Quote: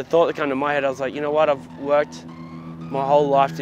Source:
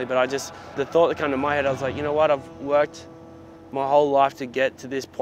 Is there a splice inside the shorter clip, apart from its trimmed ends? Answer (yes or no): no